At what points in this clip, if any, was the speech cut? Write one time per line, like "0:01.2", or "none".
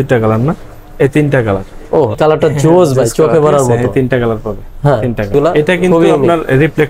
0:02.2
0:05.3